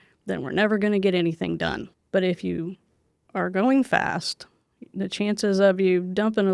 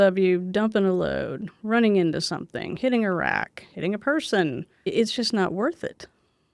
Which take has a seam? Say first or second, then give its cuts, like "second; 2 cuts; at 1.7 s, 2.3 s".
second; 1 cut; at 4.8 s